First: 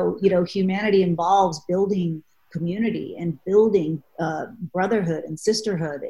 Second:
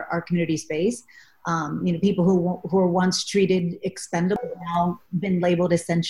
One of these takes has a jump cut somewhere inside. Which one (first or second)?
second